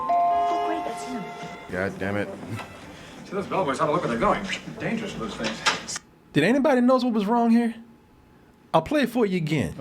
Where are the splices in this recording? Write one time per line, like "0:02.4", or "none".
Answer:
0:01.7